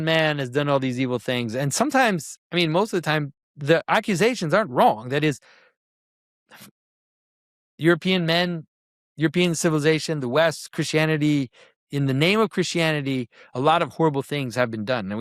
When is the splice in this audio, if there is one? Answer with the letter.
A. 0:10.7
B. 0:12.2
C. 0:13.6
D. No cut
D